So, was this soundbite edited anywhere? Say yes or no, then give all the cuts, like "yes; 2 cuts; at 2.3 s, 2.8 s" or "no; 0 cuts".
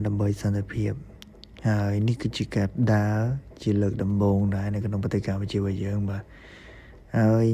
no; 0 cuts